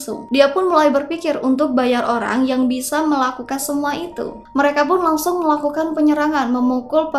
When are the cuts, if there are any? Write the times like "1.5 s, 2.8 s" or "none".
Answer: 4.4 s